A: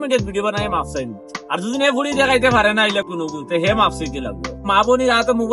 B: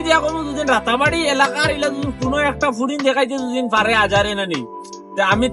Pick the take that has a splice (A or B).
A